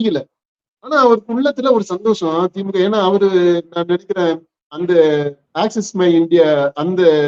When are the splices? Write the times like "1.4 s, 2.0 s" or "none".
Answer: none